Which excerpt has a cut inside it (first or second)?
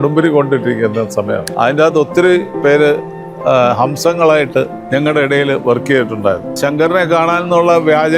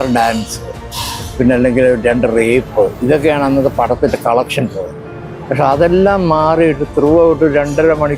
first